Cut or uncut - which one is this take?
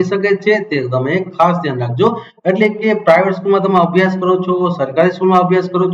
uncut